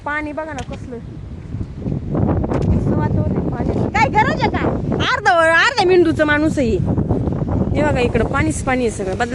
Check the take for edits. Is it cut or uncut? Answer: uncut